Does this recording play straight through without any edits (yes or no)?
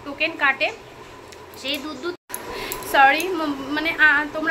no